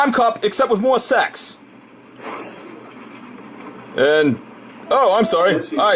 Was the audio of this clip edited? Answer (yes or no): yes